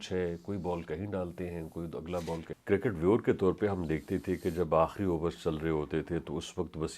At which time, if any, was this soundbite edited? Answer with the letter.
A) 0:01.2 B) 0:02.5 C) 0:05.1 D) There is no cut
B